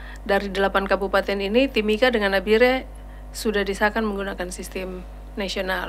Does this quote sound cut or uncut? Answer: uncut